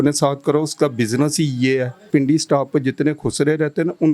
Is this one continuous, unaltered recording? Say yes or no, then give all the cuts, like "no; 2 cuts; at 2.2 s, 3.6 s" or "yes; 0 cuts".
no; 1 cut; at 2.0 s